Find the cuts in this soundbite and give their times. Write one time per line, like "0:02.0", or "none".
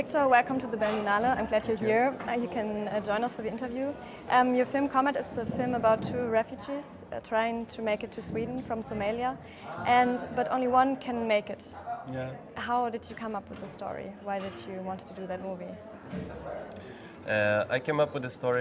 none